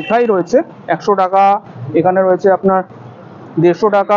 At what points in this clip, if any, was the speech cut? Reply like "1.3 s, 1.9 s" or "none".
none